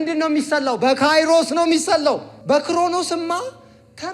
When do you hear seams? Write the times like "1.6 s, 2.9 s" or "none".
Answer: 2.3 s